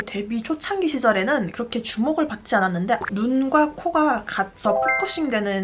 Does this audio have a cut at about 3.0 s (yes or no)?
yes